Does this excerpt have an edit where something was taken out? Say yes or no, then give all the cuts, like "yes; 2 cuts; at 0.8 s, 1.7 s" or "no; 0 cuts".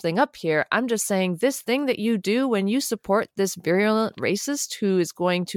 no; 0 cuts